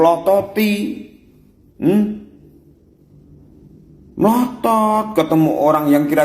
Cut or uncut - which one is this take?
uncut